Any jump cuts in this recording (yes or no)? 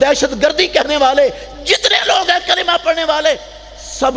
no